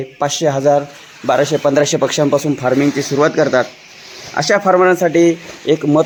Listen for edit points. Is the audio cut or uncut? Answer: uncut